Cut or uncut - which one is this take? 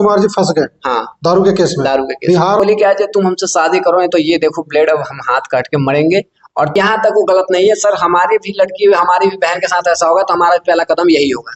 cut